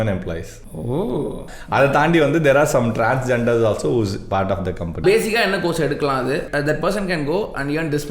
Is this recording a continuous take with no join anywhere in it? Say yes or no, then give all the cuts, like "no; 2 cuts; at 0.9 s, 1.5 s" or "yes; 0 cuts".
no; 3 cuts; at 1.5 s, 5.0 s, 6.5 s